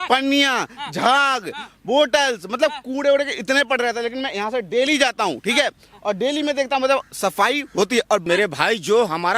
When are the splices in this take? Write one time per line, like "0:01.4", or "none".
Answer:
0:08.2